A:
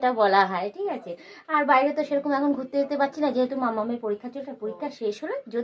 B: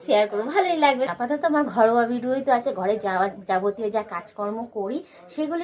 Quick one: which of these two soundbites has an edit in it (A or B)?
B